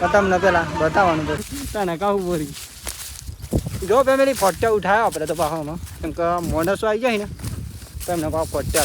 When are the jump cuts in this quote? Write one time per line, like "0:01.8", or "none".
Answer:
0:01.4